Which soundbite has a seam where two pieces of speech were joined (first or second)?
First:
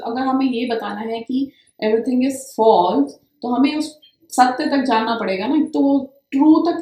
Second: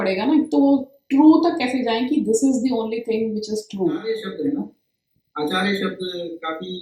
second